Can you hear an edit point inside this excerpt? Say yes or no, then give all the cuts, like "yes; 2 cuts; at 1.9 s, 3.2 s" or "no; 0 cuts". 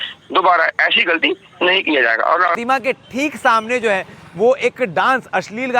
yes; 1 cut; at 2.6 s